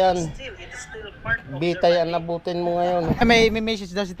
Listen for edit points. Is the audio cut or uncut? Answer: cut